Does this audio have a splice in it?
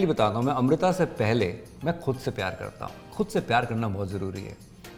no; 0 cuts

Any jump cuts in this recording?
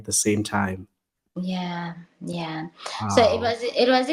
no; 0 cuts

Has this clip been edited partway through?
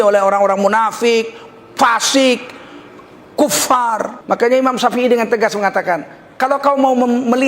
yes; 1 cut; at 4.1 s

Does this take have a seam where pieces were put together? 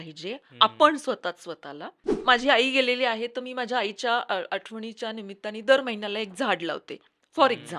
yes; 1 cut; at 2.2 s

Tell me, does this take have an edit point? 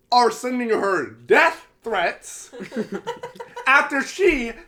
no; 0 cuts

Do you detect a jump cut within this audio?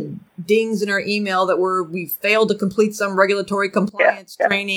no; 0 cuts

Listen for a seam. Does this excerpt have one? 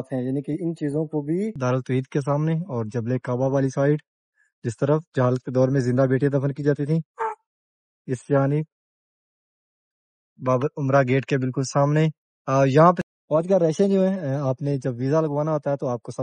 yes; 2 cuts; at 1.6 s, 13.0 s

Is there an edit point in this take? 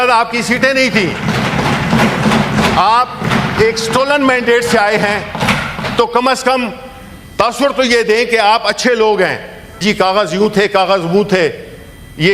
yes; 2 cuts; at 3.2 s, 9.8 s

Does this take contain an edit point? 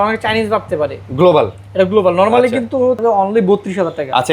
yes; 1 cut; at 3.0 s

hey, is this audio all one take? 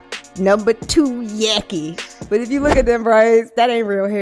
no; 1 cut; at 2.1 s

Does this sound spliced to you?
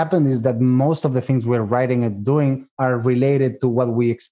yes; 1 cut; at 2.7 s

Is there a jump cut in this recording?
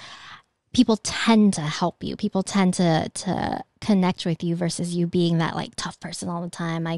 no; 0 cuts

